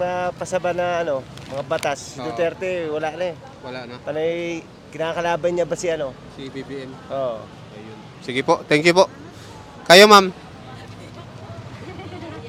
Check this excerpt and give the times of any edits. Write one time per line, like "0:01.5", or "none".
none